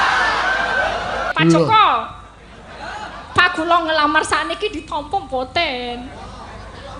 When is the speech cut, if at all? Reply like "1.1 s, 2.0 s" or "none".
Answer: 1.3 s